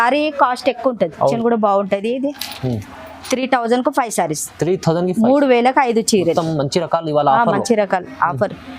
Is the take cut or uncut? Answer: cut